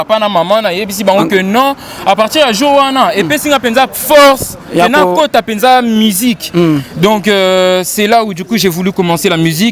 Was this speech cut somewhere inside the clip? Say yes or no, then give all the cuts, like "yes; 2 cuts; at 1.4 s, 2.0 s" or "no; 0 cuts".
no; 0 cuts